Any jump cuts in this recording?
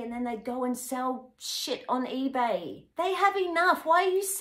yes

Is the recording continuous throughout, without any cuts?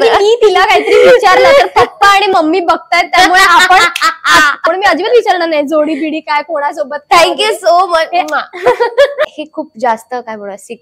no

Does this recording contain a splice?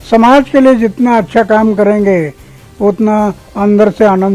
no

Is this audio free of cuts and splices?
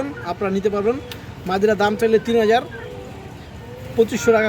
yes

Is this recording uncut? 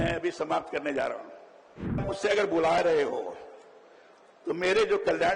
no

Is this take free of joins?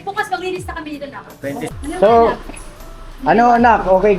no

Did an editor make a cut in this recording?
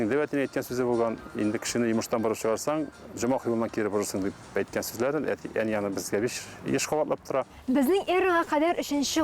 yes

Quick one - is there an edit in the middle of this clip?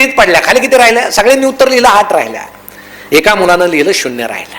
no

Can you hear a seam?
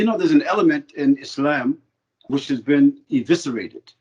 yes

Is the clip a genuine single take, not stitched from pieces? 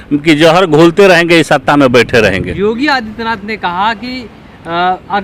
yes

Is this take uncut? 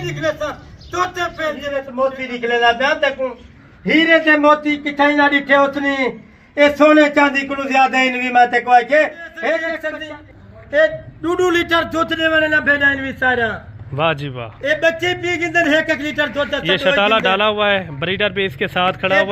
no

